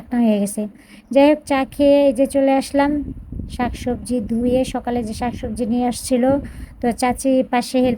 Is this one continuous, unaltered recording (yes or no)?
yes